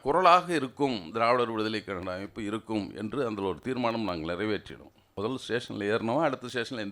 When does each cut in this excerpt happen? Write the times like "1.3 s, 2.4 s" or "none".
5.0 s